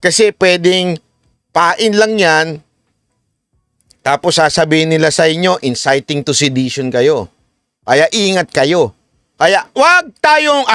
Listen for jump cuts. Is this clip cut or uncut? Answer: uncut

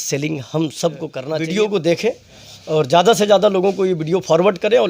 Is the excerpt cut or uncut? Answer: cut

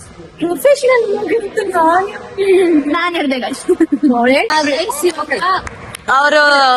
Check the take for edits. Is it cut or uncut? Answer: uncut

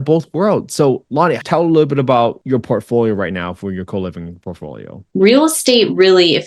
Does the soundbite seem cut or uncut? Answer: cut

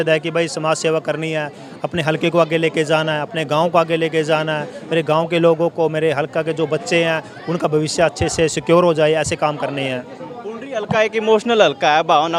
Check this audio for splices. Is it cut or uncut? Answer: uncut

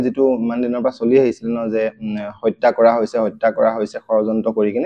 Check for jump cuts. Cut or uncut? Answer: uncut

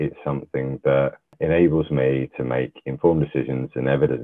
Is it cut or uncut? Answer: cut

